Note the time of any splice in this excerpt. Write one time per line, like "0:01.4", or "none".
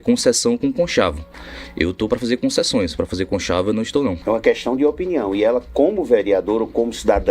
0:04.2